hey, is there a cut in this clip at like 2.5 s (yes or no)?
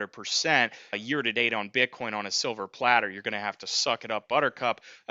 no